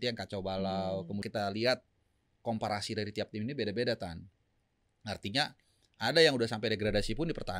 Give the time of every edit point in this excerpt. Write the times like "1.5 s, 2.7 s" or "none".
1.2 s